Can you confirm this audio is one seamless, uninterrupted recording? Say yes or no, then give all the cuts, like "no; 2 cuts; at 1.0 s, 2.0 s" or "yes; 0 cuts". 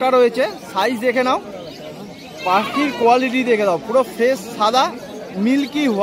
yes; 0 cuts